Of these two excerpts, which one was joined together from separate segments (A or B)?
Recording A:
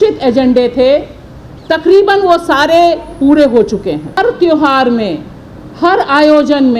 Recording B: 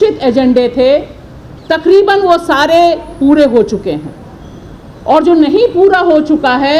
A